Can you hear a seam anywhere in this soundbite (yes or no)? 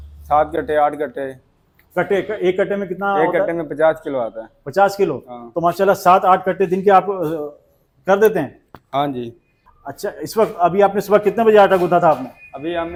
no